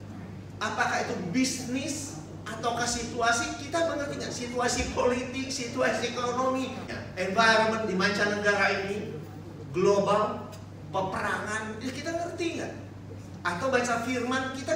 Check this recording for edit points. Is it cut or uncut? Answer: cut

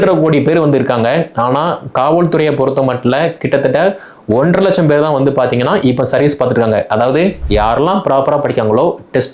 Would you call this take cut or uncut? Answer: cut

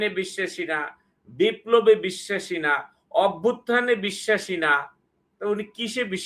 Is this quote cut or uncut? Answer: uncut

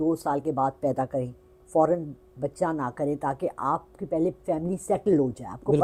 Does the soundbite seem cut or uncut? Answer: uncut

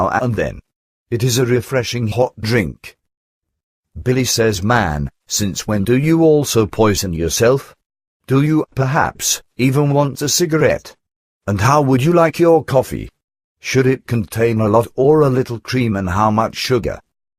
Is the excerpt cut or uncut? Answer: cut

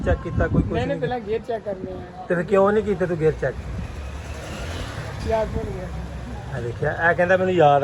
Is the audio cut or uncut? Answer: uncut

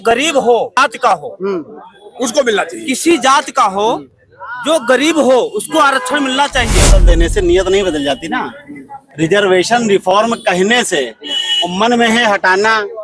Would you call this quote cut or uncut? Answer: cut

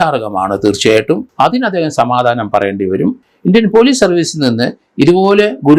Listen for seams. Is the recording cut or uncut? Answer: cut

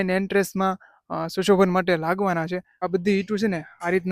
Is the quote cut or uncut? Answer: cut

